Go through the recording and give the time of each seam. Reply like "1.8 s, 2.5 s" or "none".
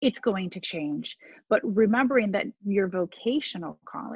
none